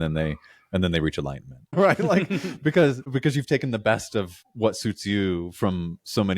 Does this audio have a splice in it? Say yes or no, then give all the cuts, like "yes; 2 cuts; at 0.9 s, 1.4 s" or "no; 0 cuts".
yes; 3 cuts; at 1.7 s, 3.0 s, 4.4 s